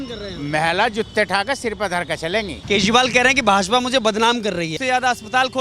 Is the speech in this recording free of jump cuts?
no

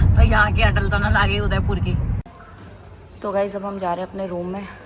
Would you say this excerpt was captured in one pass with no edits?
no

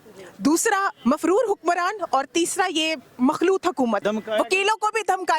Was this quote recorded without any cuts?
no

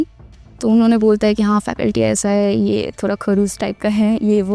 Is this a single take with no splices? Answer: yes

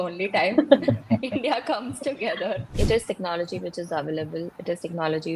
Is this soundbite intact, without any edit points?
no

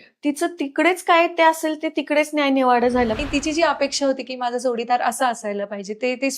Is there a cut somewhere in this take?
yes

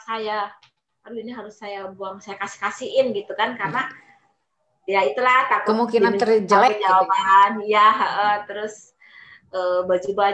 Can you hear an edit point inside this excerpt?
no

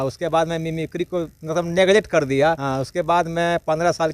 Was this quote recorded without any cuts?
no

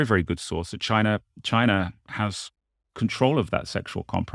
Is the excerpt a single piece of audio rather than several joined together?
yes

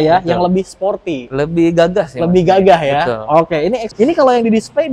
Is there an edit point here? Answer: yes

